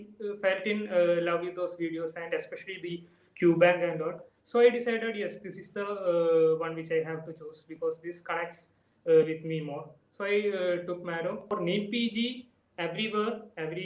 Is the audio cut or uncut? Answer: cut